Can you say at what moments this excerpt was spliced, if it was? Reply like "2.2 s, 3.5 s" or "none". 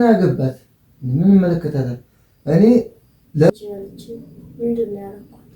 3.5 s